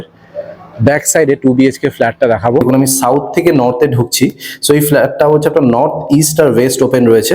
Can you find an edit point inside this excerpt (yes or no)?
yes